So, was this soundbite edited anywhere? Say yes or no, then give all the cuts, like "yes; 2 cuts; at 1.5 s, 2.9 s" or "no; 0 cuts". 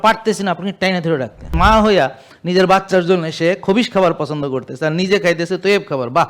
yes; 1 cut; at 1.5 s